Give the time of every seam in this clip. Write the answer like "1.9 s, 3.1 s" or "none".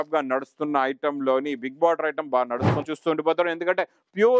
2.9 s